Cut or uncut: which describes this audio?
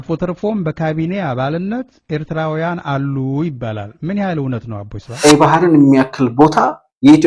cut